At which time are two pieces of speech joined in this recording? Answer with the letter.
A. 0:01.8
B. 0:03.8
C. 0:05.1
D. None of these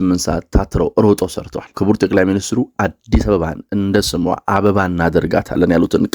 A